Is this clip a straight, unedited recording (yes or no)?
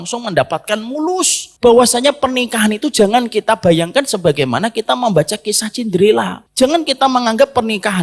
no